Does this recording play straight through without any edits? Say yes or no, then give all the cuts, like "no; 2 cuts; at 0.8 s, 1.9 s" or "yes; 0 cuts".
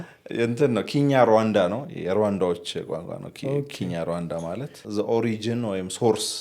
no; 1 cut; at 4.8 s